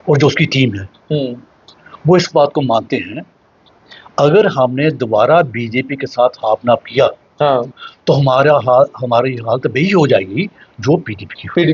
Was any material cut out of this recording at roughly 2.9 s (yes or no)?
no